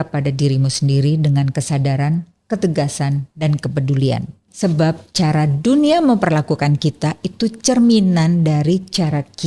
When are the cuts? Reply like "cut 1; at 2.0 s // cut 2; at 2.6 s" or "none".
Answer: cut 1; at 4.5 s

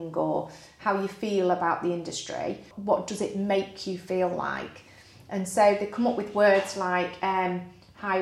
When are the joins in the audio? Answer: cut 1; at 2.7 s

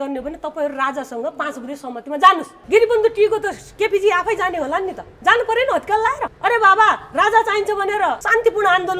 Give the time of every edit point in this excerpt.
cut 1; at 2.6 s

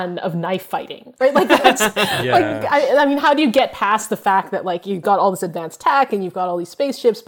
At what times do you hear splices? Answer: none

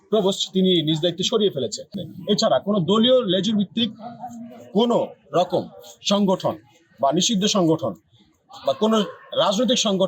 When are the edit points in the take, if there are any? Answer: cut 1; at 2.0 s

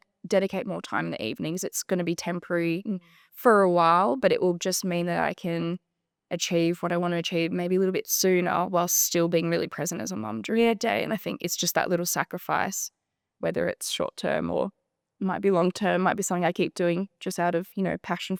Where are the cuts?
none

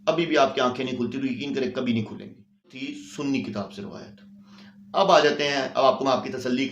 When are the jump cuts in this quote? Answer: cut 1; at 2.8 s

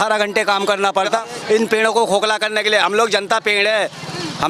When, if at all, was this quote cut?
cut 1; at 1.4 s

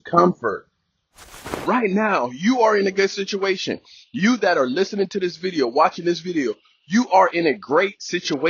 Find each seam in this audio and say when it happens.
cut 1; at 1.4 s

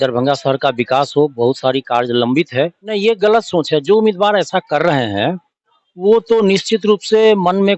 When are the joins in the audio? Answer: cut 1; at 2.8 s

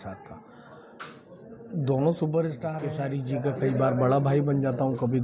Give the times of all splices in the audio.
cut 1; at 2.8 s

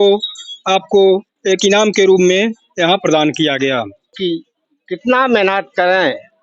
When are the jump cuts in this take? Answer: cut 1; at 4.2 s

